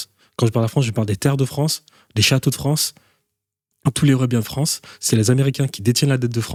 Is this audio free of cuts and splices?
yes; 0 cuts

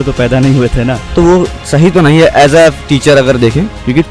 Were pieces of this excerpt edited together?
yes; 1 cut; at 1.1 s

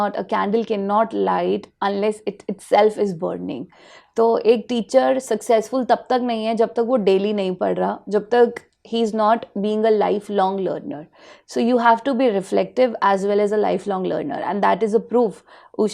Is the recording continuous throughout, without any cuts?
yes; 0 cuts

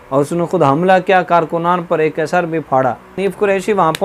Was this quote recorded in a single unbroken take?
no; 1 cut; at 3.1 s

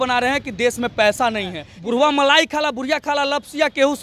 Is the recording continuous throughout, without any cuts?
no; 1 cut; at 1.7 s

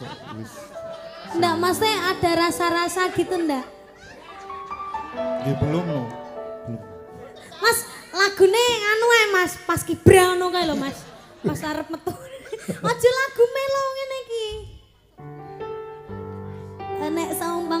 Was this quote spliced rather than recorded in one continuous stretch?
no; 0 cuts

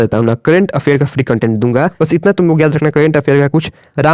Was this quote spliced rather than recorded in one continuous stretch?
yes; 1 cut; at 1.8 s

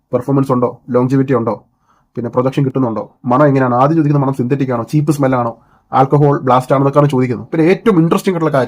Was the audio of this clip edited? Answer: yes; 1 cut; at 7.4 s

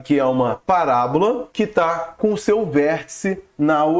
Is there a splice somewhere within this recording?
yes; 1 cut; at 1.5 s

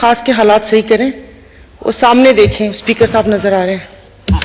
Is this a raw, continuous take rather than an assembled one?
yes; 0 cuts

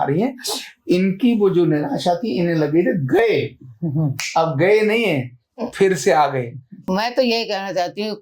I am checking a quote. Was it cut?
yes; 1 cut; at 6.9 s

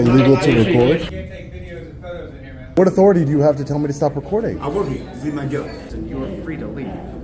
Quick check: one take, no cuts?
no; 3 cuts; at 1.1 s, 2.7 s, 5.8 s

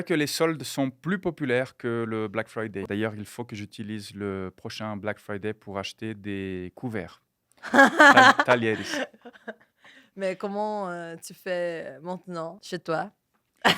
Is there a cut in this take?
yes; 2 cuts; at 2.8 s, 12.6 s

